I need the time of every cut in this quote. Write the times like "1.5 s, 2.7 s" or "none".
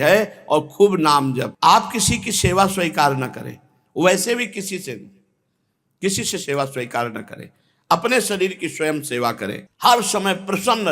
1.5 s, 9.7 s